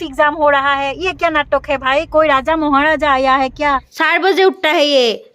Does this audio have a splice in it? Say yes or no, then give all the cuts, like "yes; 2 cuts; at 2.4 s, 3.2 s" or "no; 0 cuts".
yes; 1 cut; at 3.9 s